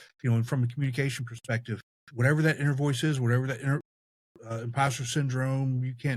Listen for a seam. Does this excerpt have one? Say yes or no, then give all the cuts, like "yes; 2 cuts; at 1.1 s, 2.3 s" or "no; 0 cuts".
yes; 1 cut; at 2.0 s